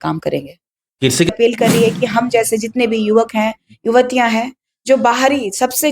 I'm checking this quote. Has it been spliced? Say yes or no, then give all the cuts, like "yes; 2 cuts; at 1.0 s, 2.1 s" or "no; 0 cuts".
yes; 1 cut; at 1.3 s